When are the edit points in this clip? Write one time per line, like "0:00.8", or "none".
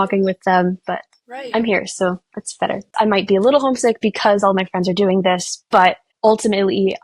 0:02.9